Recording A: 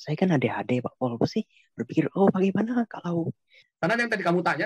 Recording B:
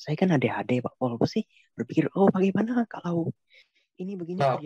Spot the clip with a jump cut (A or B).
A